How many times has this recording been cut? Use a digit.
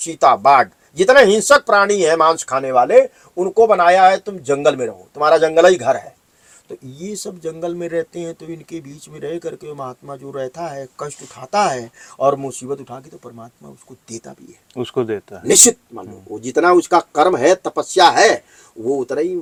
0